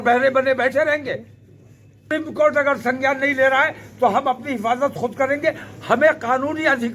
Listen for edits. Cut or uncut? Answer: cut